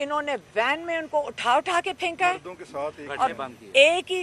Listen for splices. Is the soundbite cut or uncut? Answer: uncut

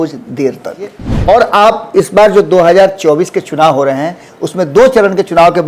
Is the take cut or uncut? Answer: cut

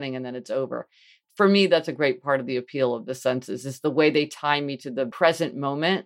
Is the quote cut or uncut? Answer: cut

